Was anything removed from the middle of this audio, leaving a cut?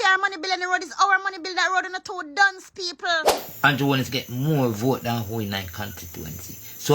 yes; 1 cut; at 3.4 s

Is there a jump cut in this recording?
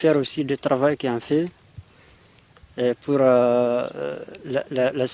no; 0 cuts

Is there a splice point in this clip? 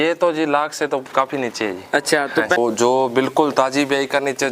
yes; 1 cut; at 2.6 s

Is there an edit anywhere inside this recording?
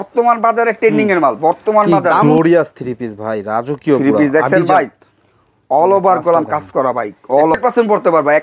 yes; 2 cuts; at 2.2 s, 7.5 s

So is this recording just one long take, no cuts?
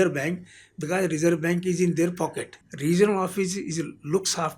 no; 1 cut; at 2.5 s

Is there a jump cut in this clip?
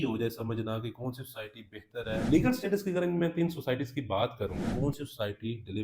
yes; 2 cuts; at 2.2 s, 4.7 s

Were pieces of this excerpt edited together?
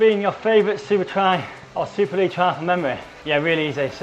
yes; 2 cuts; at 1.6 s, 3.1 s

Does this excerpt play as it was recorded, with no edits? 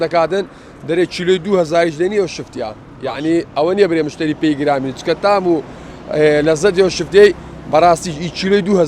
yes; 0 cuts

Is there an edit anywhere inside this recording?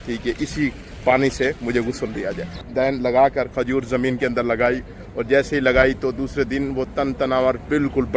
yes; 2 cuts; at 0.9 s, 2.5 s

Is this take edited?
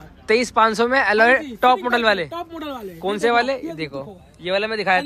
no; 0 cuts

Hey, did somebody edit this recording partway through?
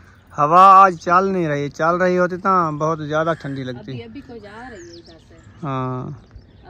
no; 0 cuts

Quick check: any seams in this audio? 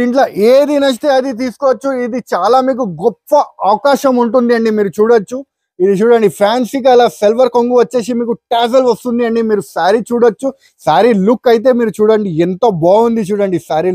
no; 0 cuts

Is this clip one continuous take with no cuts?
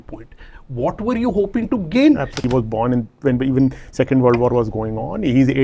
no; 1 cut; at 2.3 s

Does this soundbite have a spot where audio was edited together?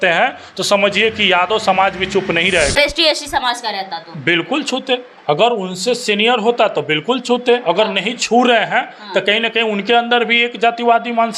yes; 1 cut; at 2.7 s

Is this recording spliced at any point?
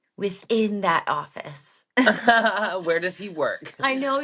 no; 0 cuts

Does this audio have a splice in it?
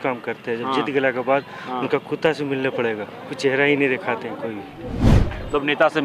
yes; 1 cut; at 5.0 s

